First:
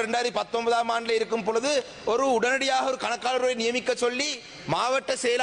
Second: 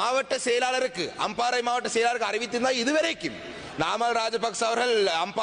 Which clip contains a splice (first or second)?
second